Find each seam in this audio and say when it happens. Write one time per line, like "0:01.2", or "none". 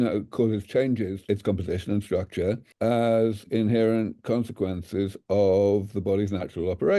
0:01.2